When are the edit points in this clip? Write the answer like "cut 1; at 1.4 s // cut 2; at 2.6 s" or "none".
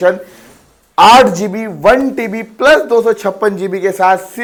none